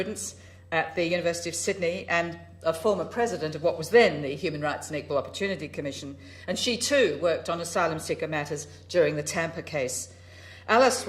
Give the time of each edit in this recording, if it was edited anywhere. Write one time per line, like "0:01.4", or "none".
none